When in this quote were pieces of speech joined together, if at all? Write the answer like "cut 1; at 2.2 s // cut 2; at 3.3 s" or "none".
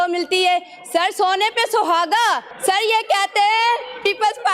cut 1; at 2.5 s